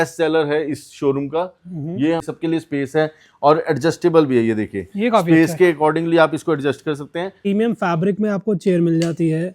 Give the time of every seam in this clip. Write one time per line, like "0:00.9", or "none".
0:02.2
0:07.5